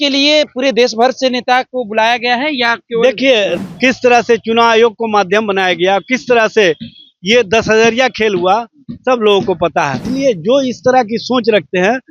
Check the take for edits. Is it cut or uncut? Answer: cut